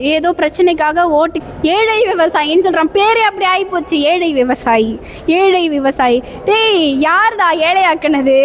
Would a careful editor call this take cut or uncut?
cut